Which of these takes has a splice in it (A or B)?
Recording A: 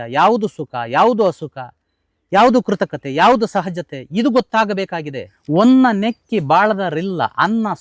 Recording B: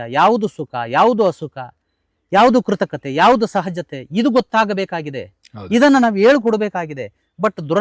A